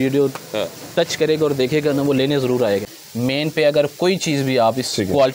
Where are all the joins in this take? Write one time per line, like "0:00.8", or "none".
0:02.9